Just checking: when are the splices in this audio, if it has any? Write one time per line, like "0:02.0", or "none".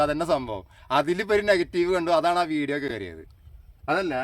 none